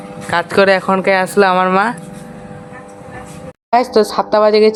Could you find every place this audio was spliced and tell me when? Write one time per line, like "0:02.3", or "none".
none